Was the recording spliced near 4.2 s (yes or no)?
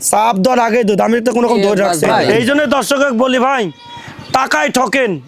no